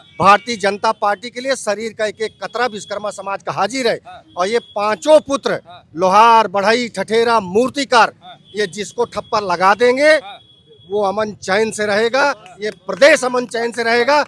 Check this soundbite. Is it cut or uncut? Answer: uncut